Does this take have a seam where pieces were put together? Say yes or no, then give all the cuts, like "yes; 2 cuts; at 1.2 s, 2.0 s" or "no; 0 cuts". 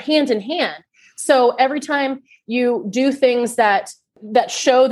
no; 0 cuts